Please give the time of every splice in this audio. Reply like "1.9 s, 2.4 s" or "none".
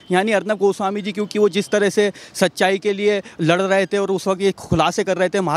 none